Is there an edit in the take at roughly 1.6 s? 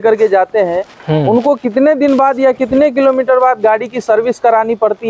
no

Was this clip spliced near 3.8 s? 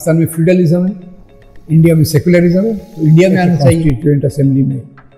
yes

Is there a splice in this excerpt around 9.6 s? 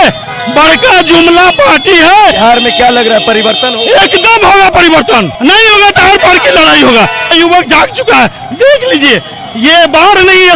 no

